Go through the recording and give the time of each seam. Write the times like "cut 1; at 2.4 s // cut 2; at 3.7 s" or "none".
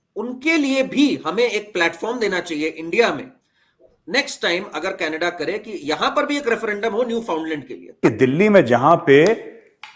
cut 1; at 8.0 s

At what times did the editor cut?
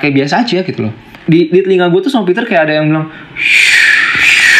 cut 1; at 1.1 s

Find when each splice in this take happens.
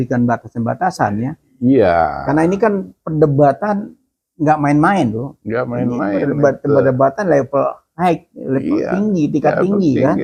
none

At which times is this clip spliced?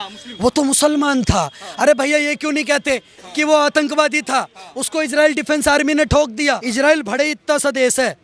cut 1; at 6.6 s

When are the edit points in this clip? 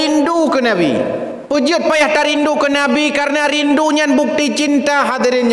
cut 1; at 1.4 s

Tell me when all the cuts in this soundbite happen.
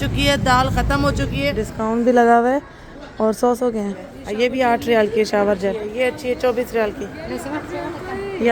cut 1; at 1.6 s // cut 2; at 4.2 s // cut 3; at 5.9 s

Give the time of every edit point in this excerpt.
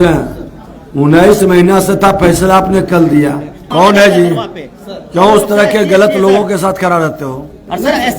cut 1; at 3.6 s

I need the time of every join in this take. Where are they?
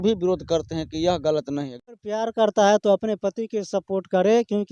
cut 1; at 1.7 s

